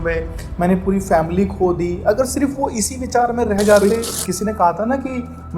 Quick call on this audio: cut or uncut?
cut